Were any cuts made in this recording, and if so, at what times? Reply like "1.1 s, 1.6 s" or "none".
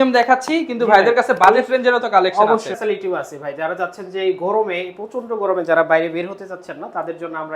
2.7 s

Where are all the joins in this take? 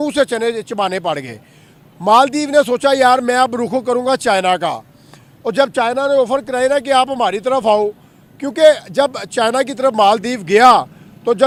none

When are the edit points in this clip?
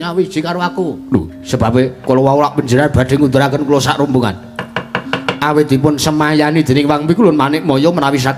2.0 s

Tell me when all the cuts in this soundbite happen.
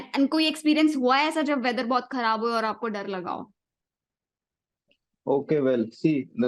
none

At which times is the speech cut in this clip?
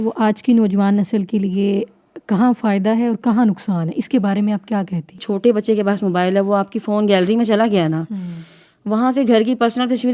5.2 s

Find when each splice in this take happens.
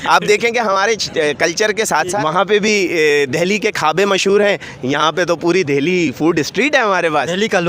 2.1 s

